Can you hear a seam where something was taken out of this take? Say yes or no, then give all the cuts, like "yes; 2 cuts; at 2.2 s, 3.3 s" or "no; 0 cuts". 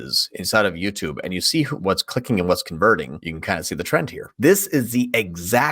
yes; 3 cuts; at 1.7 s, 3.2 s, 4.2 s